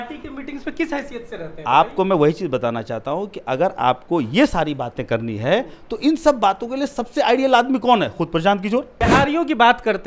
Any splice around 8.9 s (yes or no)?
yes